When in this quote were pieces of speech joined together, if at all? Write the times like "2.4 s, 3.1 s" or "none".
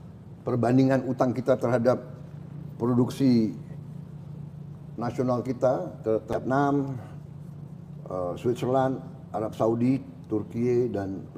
6.3 s